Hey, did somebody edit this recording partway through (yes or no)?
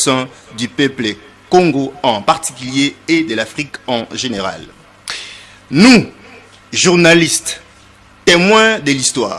no